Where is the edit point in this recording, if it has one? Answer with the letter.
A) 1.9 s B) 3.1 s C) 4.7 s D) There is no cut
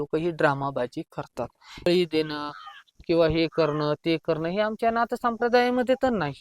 A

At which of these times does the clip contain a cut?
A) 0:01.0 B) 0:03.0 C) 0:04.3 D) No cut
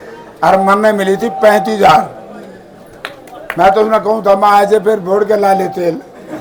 D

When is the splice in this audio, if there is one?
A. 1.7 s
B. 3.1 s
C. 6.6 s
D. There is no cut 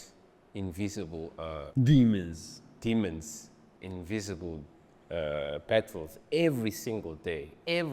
A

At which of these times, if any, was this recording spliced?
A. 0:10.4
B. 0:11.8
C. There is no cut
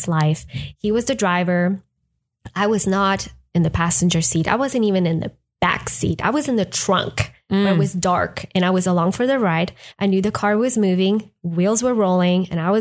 C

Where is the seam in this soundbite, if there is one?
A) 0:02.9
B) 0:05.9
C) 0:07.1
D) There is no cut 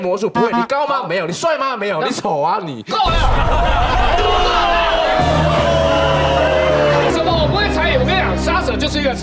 C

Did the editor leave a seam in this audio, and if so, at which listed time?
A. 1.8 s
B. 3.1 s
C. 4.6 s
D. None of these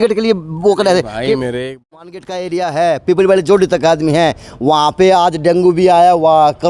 A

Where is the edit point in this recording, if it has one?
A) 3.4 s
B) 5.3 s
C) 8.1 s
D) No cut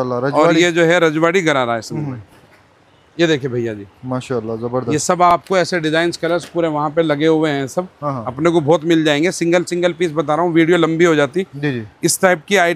D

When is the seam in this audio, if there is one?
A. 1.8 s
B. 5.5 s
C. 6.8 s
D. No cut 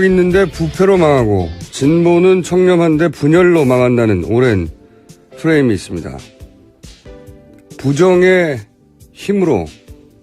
D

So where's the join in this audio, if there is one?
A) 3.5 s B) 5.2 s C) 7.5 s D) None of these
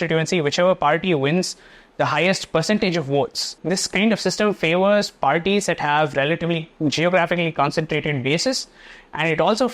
A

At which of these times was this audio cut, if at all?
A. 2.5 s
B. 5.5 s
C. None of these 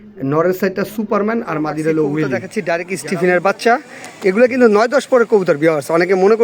A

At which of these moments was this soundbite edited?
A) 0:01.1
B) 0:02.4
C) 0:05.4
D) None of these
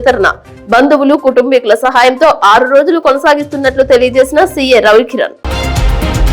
C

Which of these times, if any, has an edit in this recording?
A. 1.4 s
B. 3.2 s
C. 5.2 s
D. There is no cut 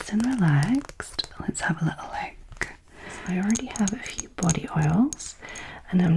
B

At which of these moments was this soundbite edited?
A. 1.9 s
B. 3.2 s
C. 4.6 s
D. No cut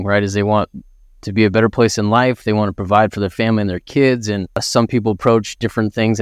C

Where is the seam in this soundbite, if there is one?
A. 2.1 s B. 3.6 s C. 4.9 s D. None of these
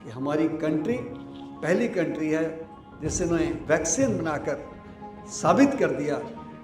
B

